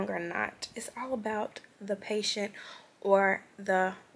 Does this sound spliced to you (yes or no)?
no